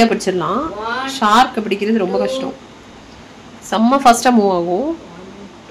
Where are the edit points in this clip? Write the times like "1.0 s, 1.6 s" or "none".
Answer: none